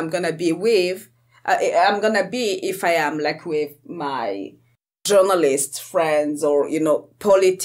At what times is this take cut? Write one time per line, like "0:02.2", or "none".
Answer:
none